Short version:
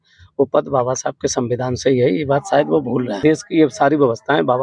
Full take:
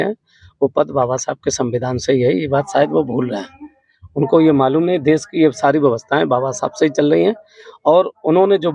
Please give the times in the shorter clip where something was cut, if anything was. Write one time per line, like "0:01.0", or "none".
0:03.2